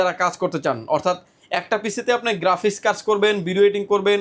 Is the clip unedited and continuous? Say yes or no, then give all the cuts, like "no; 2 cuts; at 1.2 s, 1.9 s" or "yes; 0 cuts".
yes; 0 cuts